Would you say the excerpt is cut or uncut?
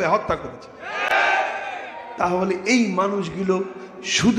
uncut